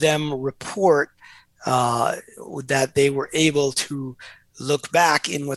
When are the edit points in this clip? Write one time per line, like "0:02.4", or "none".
none